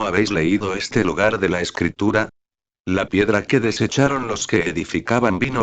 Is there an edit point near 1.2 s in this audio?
no; 0 cuts

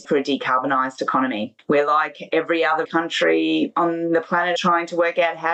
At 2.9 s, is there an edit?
yes; 4 cuts; at 1.5 s, 2.9 s, 3.7 s, 4.6 s

